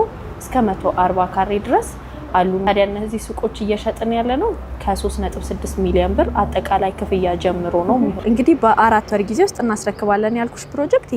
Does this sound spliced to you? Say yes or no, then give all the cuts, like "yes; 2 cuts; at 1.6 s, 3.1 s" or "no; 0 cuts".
yes; 2 cuts; at 2.6 s, 8.2 s